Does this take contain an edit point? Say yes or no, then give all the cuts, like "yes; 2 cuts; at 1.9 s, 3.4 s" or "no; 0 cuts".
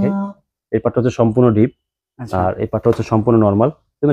no; 0 cuts